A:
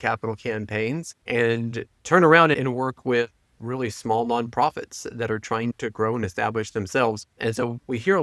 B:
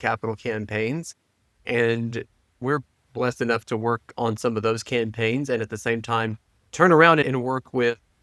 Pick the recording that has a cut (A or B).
A